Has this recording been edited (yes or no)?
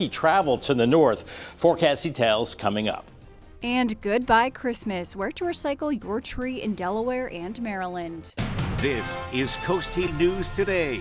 yes